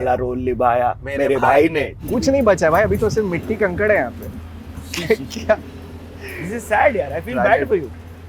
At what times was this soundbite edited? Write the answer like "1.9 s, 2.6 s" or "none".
2.0 s